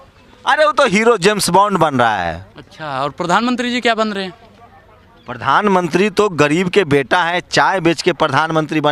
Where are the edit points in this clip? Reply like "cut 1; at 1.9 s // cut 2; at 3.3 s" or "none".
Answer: none